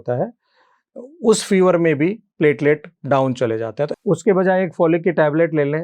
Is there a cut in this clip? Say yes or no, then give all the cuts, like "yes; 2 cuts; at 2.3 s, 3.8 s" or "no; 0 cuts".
yes; 1 cut; at 3.9 s